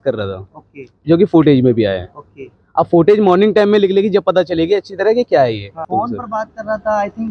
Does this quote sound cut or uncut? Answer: cut